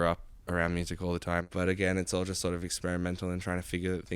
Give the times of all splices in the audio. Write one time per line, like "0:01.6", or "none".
0:01.4